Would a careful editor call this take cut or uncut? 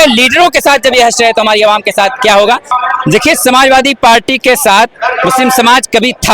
cut